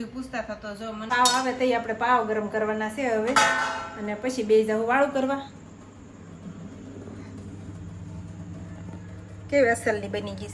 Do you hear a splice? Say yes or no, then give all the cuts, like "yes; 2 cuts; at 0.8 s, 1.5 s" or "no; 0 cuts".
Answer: yes; 1 cut; at 1.0 s